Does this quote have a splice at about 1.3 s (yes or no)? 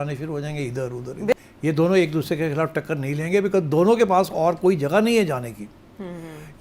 yes